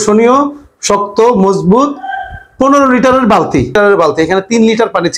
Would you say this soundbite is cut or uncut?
cut